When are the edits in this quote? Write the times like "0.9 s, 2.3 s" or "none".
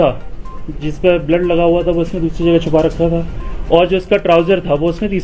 none